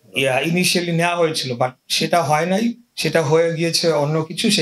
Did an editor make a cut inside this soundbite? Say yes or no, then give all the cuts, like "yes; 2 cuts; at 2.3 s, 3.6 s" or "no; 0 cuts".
no; 0 cuts